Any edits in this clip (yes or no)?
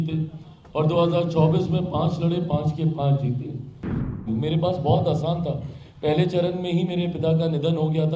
yes